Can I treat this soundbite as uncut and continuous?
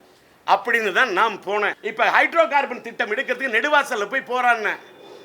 no; 1 cut; at 1.8 s

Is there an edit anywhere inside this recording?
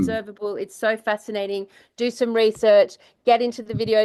no; 0 cuts

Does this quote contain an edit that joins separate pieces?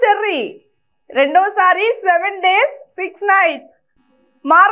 no; 0 cuts

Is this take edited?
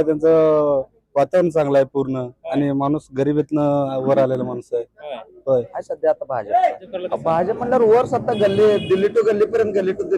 yes; 2 cuts; at 5.8 s, 6.9 s

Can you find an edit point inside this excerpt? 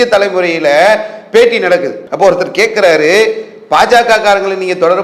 yes; 1 cut; at 2.0 s

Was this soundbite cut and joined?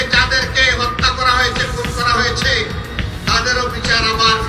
no; 0 cuts

